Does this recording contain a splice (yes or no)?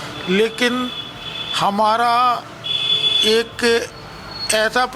no